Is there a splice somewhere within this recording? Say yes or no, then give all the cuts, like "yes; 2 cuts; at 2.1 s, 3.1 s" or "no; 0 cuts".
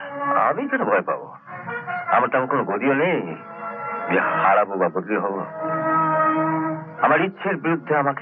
no; 0 cuts